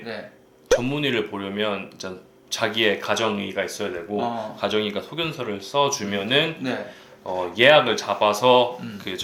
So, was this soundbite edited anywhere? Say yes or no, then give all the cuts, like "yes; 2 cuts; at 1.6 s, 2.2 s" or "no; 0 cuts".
no; 0 cuts